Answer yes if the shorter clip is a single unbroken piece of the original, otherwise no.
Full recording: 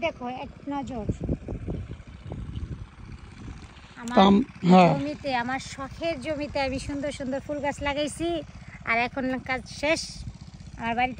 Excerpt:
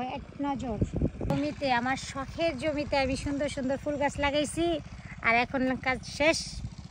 no